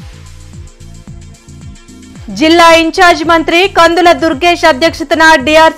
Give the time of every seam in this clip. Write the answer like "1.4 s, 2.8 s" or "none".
none